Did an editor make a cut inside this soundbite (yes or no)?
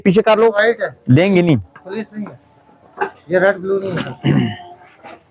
no